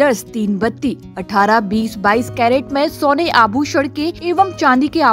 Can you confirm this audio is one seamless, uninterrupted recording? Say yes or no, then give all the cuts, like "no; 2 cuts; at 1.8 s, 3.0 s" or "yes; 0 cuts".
no; 1 cut; at 4.2 s